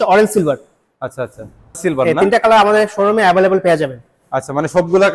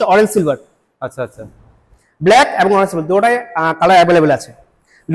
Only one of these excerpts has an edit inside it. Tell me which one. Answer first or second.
first